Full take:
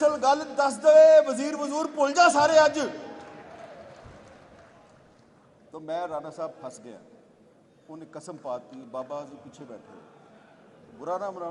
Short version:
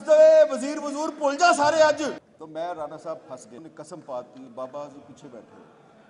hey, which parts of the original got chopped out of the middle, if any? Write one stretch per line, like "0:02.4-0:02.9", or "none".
0:03.0-0:05.6
0:06.9-0:07.9